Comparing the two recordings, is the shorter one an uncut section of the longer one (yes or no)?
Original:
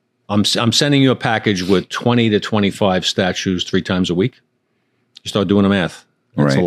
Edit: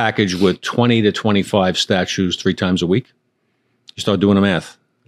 yes